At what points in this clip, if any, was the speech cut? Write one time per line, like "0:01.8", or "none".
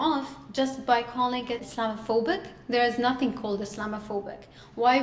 0:01.7